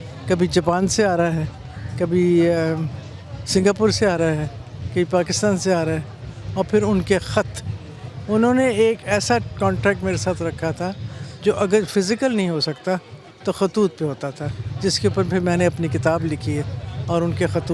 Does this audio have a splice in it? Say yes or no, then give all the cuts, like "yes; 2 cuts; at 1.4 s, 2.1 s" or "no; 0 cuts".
no; 0 cuts